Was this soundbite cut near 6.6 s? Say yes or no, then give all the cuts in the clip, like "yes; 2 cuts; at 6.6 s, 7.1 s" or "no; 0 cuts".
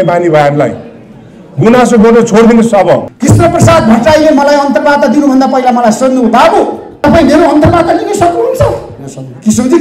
no; 1 cut; at 3.1 s